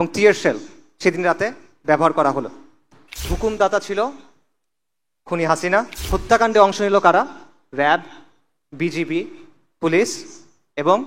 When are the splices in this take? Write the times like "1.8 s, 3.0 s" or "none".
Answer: 3.3 s, 6.0 s